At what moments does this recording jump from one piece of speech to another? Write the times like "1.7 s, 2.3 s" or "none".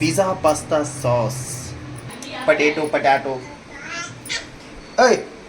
2.3 s